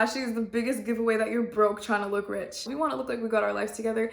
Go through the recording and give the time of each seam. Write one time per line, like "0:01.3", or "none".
0:02.7